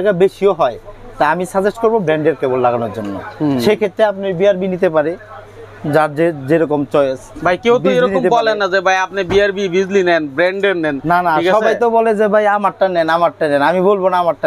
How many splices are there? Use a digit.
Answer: 0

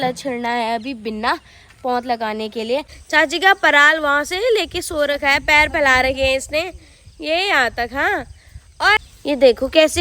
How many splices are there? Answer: 2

